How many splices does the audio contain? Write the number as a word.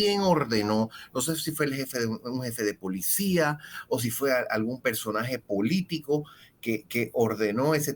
zero